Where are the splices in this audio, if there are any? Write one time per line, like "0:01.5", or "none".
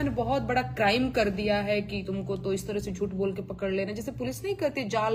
none